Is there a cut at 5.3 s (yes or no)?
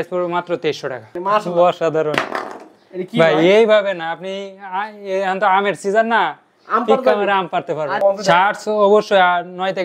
no